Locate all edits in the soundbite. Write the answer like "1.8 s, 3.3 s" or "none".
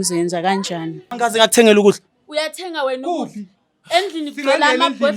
1.1 s